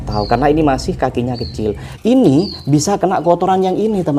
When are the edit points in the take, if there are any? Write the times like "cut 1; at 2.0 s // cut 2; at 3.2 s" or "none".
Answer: cut 1; at 1.8 s